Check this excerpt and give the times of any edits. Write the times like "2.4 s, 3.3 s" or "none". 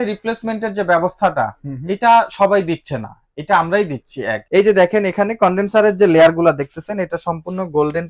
4.3 s